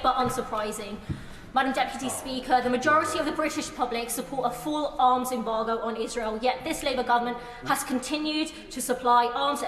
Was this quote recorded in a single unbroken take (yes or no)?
yes